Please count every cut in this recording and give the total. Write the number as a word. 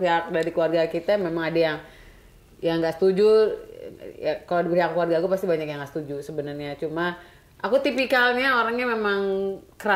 zero